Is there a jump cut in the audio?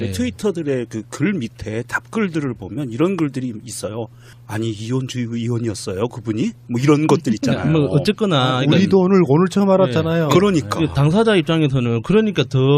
yes; 1 cut; at 7.2 s

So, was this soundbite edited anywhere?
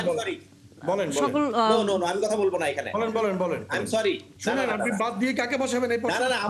yes; 1 cut; at 4.3 s

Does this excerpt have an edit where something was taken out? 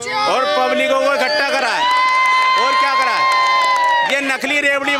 no; 0 cuts

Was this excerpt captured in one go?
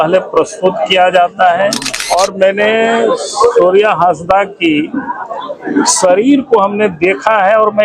no; 1 cut; at 1.9 s

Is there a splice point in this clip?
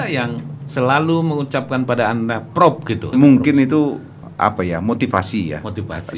yes; 2 cuts; at 3.1 s, 4.2 s

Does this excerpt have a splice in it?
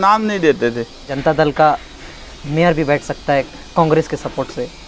yes; 1 cut; at 1.1 s

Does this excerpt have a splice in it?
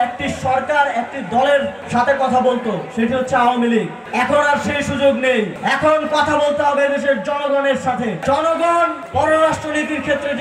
yes; 5 cuts; at 1.8 s, 4.0 s, 5.6 s, 8.2 s, 9.0 s

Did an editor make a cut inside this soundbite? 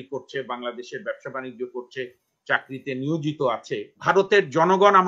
yes; 1 cut; at 4.0 s

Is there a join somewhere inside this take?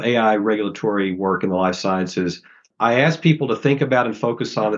yes; 1 cut; at 2.7 s

